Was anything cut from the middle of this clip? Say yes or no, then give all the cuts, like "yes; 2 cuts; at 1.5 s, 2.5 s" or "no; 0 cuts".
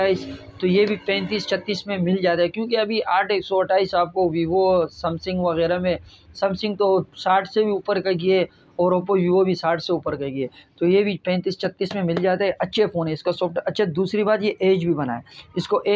no; 0 cuts